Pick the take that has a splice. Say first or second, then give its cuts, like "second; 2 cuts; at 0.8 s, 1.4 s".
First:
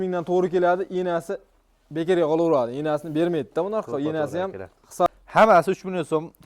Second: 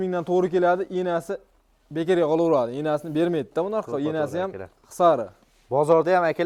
first; 1 cut; at 5.1 s